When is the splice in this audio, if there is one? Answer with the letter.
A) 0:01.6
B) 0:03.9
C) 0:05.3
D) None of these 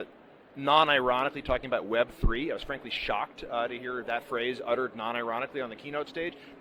D